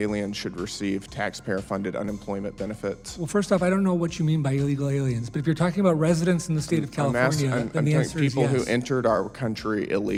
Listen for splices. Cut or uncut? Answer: uncut